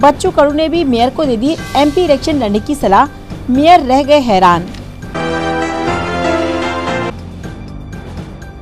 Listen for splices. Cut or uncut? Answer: uncut